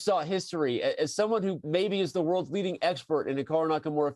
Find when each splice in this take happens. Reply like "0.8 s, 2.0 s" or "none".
1.6 s